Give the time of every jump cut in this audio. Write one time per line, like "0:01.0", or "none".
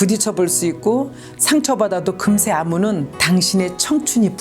0:03.1